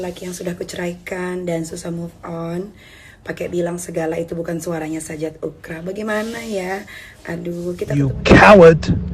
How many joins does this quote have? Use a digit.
1